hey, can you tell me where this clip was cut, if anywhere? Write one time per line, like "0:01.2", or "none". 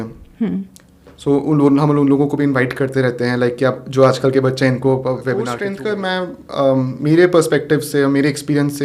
0:05.6